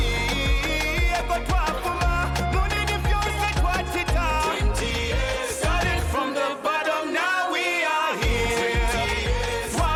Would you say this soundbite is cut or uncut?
uncut